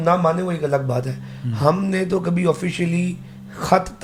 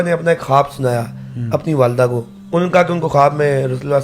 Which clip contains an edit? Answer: second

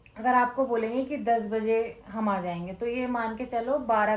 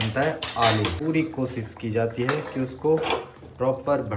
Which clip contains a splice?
second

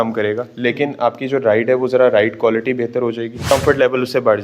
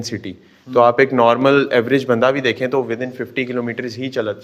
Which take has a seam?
first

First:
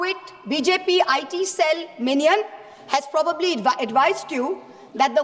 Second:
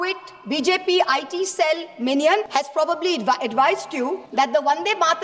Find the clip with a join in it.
second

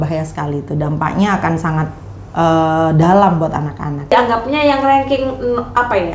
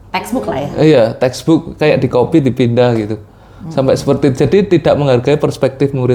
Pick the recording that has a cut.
first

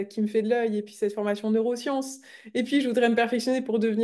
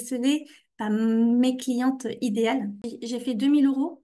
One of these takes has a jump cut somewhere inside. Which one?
second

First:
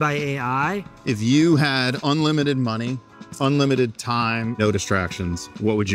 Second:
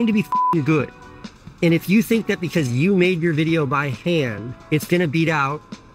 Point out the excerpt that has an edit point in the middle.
first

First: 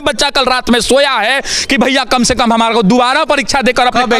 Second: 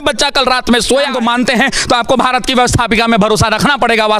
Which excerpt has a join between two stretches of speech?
second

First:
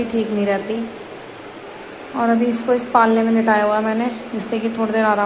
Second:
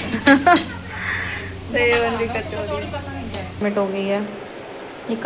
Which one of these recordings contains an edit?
second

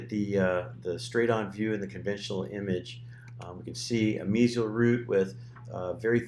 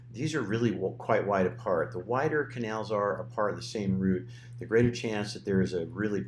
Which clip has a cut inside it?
first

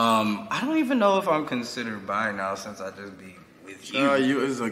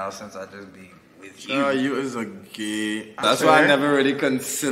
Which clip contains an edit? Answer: second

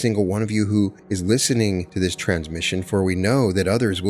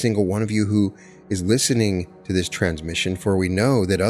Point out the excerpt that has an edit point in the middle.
first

